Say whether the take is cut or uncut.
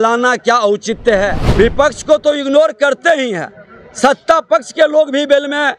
cut